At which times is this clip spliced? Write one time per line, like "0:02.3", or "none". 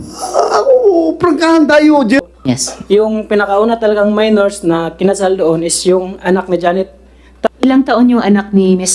0:02.2
0:07.5